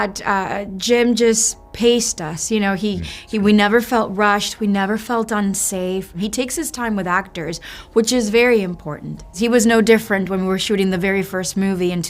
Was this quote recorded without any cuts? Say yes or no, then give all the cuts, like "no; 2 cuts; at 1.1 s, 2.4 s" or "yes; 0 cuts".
no; 2 cuts; at 6.1 s, 9.3 s